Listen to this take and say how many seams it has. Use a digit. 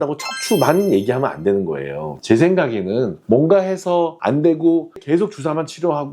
1